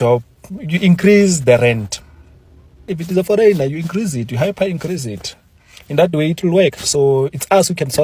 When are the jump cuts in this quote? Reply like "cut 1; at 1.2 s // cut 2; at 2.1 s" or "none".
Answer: cut 1; at 2.9 s